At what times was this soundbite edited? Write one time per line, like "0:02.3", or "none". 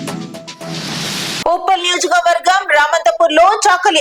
0:01.4